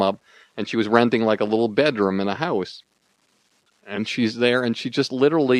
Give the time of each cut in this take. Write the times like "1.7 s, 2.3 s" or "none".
none